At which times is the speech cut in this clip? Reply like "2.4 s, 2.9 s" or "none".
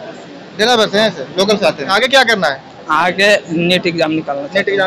1.9 s